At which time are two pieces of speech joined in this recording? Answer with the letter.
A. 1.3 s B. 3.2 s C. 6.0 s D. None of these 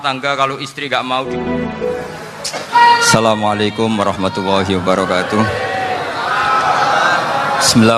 A